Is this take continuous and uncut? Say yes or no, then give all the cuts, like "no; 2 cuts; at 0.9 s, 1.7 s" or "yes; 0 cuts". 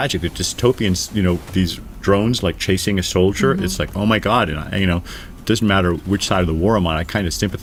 yes; 0 cuts